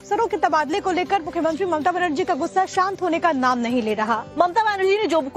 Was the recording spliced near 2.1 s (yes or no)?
yes